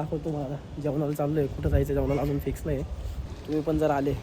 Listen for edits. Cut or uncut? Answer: cut